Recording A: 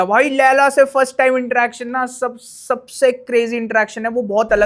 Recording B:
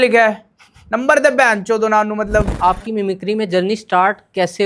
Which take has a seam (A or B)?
B